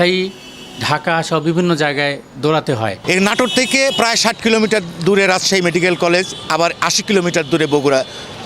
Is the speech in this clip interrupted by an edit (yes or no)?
yes